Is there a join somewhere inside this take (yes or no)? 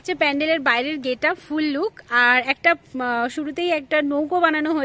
no